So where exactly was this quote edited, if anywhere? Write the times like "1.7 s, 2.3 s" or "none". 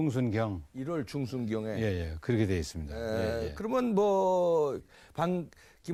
none